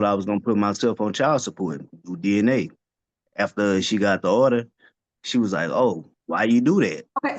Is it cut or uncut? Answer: cut